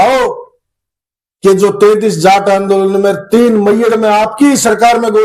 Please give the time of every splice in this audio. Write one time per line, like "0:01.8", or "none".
none